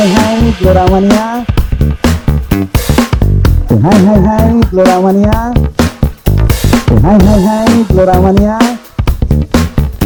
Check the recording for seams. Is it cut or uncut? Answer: uncut